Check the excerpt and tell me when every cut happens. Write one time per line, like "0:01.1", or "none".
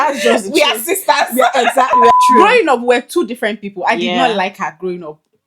0:02.1